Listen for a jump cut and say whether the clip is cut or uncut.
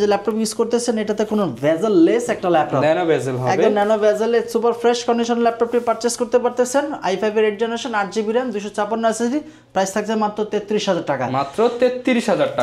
uncut